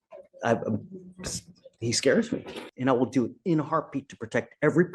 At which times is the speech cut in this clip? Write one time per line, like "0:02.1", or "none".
0:02.7